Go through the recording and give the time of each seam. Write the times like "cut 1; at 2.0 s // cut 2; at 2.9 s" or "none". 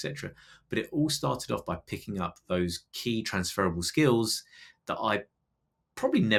none